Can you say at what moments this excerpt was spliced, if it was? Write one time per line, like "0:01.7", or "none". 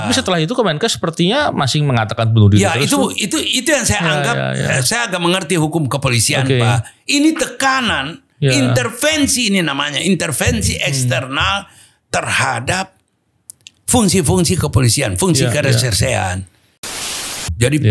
0:17.0